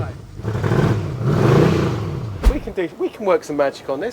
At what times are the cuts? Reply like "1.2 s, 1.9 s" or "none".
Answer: 2.5 s

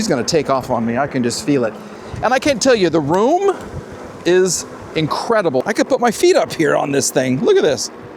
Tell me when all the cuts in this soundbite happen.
1.9 s, 5.6 s

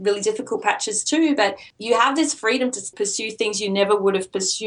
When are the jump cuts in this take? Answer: 1.7 s, 2.9 s

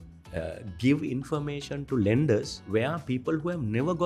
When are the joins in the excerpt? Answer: 2.6 s

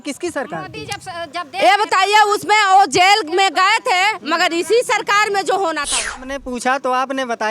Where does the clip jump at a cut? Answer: 6.4 s

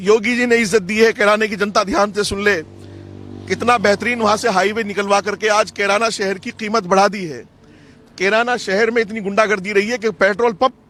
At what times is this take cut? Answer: none

